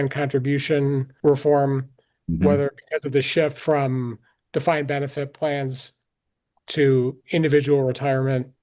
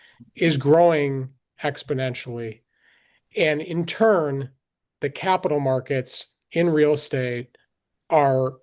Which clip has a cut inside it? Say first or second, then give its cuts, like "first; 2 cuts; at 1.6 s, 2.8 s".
first; 2 cuts; at 1.1 s, 3.6 s